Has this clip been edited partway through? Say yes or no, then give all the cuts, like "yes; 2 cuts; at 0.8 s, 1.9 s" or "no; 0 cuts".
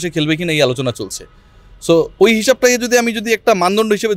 no; 0 cuts